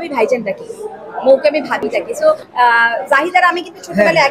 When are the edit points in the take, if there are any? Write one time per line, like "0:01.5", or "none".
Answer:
0:02.2